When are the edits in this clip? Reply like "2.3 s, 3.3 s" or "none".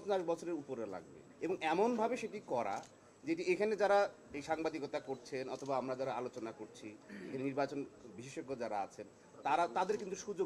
none